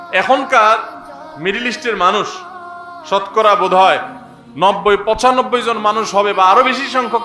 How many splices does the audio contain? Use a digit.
0